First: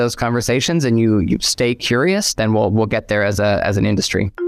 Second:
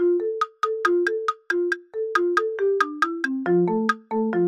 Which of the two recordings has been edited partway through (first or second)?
first